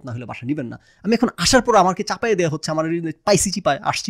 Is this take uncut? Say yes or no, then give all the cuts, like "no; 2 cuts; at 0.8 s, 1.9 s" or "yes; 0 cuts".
yes; 0 cuts